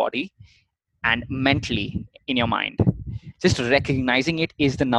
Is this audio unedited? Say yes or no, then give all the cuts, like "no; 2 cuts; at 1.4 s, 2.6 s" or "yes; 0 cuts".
yes; 0 cuts